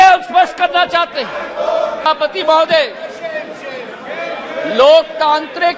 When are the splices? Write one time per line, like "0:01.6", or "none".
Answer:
0:02.1